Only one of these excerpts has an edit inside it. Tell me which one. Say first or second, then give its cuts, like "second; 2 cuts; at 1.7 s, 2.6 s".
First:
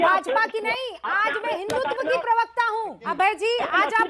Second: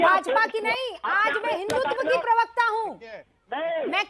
first; 1 cut; at 3.1 s